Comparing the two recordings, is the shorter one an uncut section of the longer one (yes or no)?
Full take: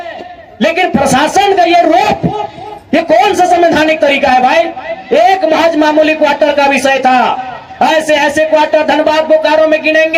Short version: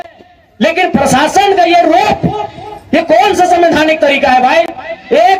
yes